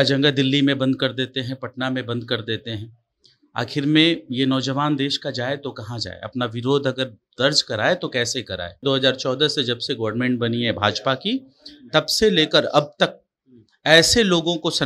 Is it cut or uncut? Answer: cut